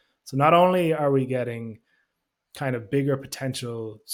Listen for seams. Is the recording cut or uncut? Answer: uncut